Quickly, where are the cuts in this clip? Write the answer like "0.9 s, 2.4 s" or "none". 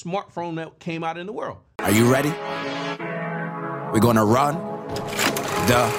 1.8 s